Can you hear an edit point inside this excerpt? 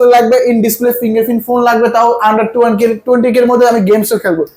no; 0 cuts

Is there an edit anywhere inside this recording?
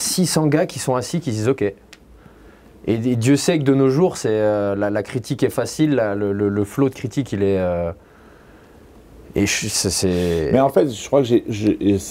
no; 0 cuts

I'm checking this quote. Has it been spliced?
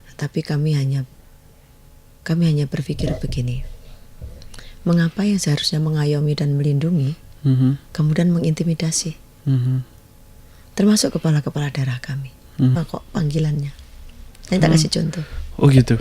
yes; 1 cut; at 12.8 s

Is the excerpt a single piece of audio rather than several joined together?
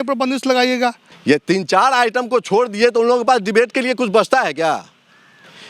no; 1 cut; at 1.1 s

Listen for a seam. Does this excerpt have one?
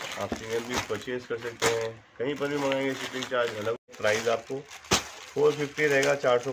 yes; 1 cut; at 3.8 s

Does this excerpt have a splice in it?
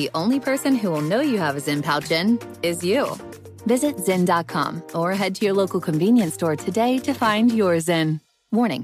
no; 0 cuts

